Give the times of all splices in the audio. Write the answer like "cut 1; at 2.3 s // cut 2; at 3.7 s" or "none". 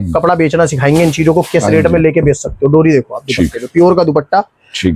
none

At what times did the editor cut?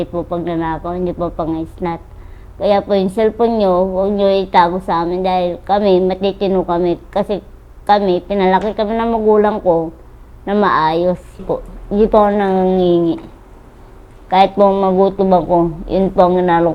cut 1; at 11.5 s

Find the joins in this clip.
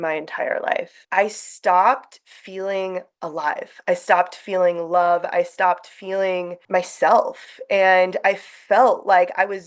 cut 1; at 1.0 s // cut 2; at 6.6 s

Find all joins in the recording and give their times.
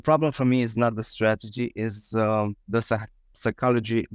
none

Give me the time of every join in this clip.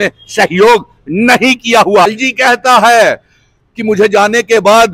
cut 1; at 2.1 s

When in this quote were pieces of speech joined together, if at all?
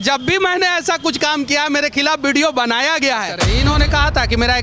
cut 1; at 3.4 s

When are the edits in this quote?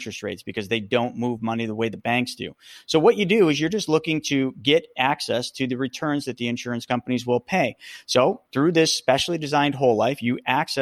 cut 1; at 8.4 s

